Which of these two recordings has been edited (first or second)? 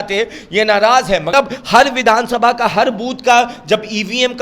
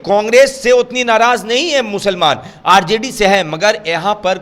first